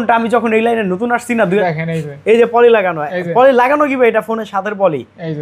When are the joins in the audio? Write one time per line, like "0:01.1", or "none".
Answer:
0:01.6